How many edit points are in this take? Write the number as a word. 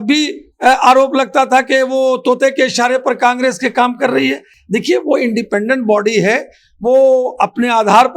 zero